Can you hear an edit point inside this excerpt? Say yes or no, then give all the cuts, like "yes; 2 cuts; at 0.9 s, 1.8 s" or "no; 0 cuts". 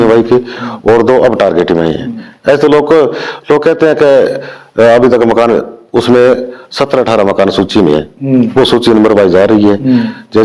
no; 0 cuts